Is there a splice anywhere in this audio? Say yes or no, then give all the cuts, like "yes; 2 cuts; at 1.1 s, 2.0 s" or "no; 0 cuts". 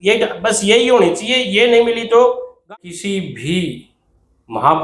yes; 1 cut; at 2.5 s